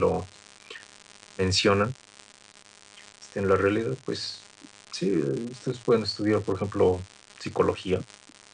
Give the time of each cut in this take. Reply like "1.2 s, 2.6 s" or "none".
1.2 s